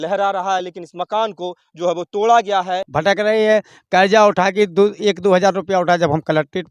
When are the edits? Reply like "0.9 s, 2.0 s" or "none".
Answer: 2.8 s